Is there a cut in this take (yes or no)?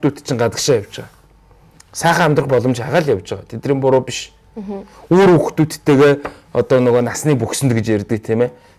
no